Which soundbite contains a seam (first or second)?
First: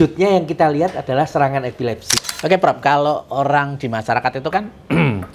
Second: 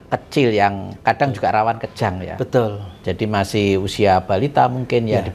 first